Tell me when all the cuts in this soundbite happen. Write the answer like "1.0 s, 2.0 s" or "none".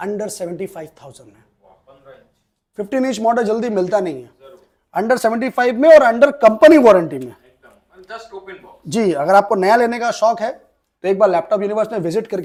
none